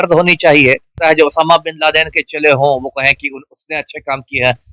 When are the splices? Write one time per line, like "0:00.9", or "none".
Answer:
0:00.9